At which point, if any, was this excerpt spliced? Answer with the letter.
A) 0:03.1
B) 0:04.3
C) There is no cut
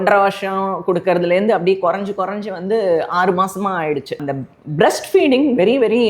B